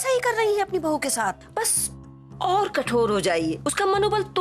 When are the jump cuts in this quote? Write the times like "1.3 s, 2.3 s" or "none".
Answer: 1.5 s

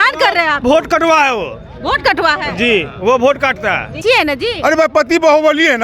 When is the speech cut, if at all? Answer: 4.0 s

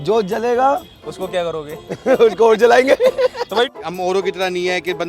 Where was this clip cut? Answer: 3.7 s

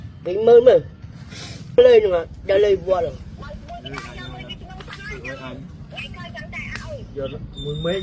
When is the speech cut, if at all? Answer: 1.8 s

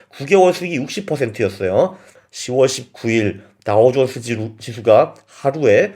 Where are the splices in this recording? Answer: 2.1 s

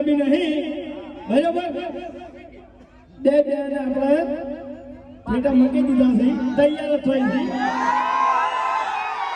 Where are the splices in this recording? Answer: none

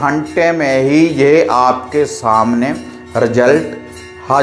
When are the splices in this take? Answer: none

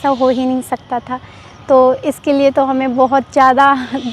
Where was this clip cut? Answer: none

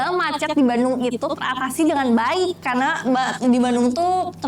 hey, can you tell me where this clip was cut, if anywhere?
none

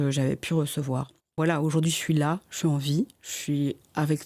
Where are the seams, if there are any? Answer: 1.4 s

